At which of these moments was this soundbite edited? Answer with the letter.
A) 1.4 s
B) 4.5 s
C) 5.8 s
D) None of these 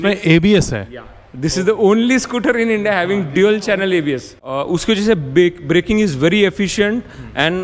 D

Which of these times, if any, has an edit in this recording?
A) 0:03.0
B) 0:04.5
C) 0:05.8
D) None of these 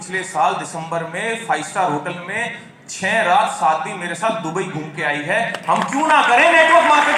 D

